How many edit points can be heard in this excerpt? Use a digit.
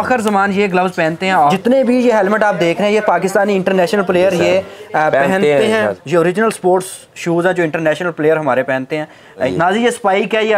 3